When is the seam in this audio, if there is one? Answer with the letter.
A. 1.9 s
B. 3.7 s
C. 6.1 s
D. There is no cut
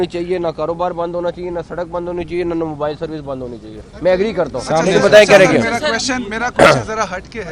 D